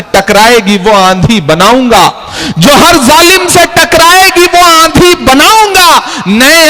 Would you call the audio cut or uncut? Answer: uncut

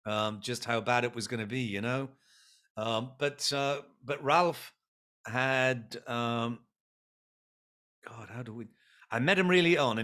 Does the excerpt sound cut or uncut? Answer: uncut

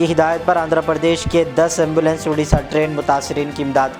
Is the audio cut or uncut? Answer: uncut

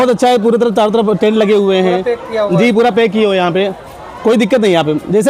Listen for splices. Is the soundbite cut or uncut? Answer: uncut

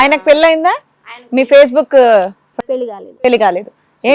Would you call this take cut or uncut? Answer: uncut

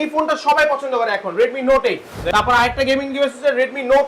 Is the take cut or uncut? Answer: cut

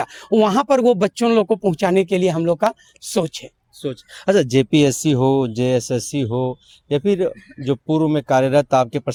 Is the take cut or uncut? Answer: uncut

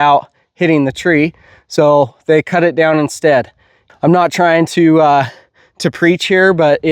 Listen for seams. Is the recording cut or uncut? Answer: cut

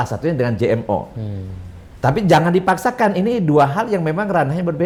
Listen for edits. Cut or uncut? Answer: uncut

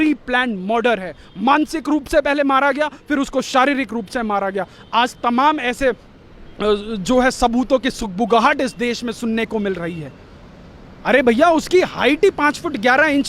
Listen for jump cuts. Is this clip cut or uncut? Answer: uncut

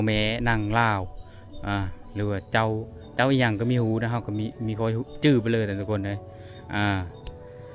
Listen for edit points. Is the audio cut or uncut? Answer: uncut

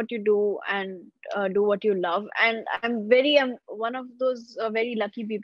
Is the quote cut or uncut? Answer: uncut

